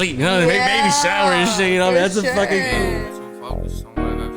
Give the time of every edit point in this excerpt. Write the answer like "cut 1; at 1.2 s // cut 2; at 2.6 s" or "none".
cut 1; at 2.7 s